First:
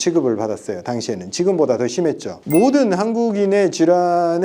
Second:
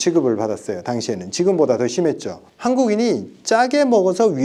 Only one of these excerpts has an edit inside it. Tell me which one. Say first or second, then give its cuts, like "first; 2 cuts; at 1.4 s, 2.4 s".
first; 1 cut; at 2.4 s